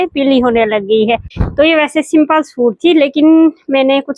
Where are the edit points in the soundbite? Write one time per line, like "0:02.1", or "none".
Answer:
0:01.4